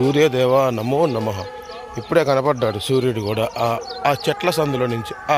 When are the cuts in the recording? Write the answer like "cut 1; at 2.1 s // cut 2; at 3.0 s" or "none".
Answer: none